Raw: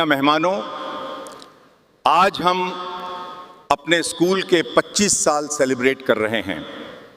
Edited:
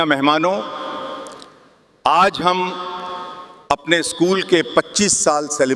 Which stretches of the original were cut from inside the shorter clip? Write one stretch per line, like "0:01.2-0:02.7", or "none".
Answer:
none